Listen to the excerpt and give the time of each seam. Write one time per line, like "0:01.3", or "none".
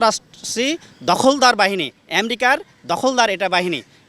none